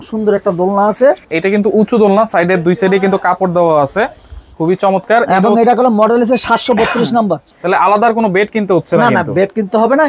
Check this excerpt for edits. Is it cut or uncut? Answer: cut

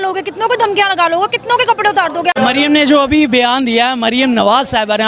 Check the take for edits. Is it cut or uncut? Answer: cut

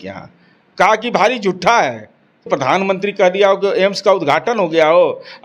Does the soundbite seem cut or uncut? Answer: cut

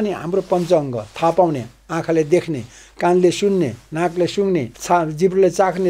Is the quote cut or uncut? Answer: cut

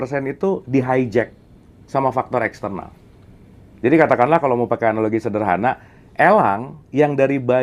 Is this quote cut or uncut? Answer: uncut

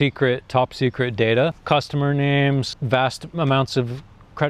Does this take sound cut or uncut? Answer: uncut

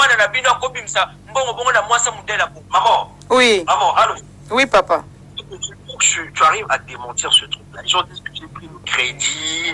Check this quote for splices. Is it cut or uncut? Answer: cut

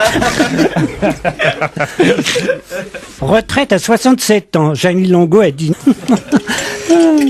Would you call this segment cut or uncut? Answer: uncut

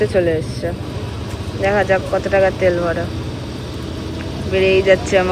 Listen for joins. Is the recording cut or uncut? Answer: uncut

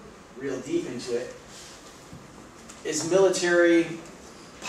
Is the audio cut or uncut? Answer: uncut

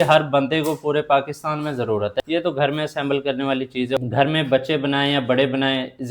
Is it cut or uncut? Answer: cut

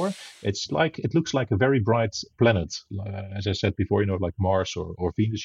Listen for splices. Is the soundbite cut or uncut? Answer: uncut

